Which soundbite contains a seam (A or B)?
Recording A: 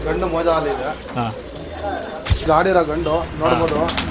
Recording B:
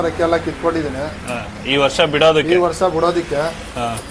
A